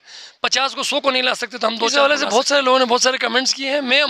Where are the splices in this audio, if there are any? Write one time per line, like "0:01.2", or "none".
0:01.9